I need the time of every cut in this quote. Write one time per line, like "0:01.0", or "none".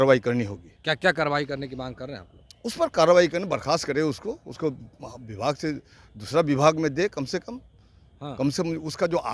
none